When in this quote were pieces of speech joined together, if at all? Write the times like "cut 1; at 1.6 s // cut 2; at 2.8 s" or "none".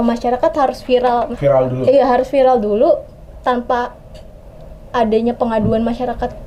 none